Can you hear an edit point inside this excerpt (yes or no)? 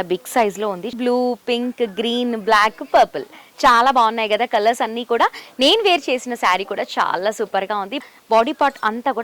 yes